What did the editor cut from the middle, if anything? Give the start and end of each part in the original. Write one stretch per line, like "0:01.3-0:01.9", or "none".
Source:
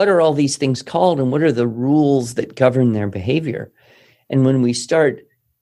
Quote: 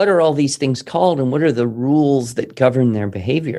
none